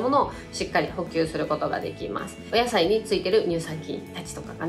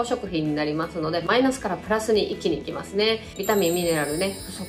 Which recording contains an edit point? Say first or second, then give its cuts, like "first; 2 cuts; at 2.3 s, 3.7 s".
first; 1 cut; at 2.4 s